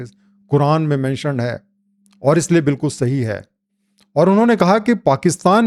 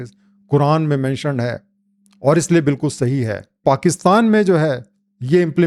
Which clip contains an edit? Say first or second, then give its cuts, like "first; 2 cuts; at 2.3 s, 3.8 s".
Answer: second; 1 cut; at 3.6 s